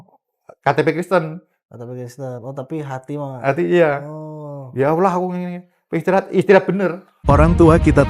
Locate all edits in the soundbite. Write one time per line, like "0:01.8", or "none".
0:07.1